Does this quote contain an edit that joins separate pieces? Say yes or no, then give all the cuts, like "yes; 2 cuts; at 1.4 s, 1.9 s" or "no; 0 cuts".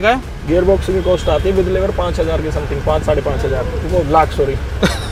no; 0 cuts